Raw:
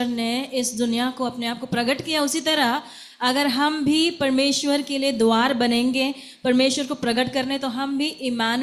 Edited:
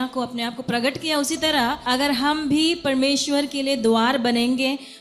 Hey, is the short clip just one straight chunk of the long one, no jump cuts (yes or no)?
no